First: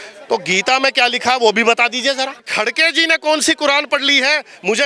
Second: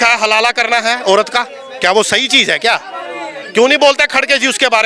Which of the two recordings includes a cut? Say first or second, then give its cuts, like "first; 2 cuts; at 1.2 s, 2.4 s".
first; 1 cut; at 2.5 s